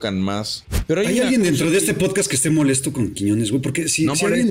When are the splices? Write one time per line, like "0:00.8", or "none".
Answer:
0:01.0